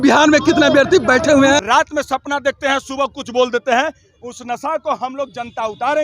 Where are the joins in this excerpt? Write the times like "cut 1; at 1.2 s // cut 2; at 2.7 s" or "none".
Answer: cut 1; at 1.6 s